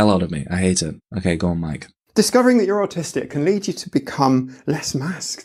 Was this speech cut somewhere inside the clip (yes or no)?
no